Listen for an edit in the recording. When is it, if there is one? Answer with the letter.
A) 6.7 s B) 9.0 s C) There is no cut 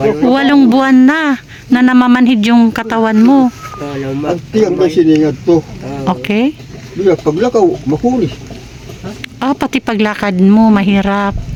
C